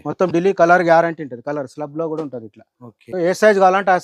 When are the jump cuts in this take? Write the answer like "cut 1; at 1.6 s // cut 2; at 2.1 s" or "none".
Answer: cut 1; at 3.1 s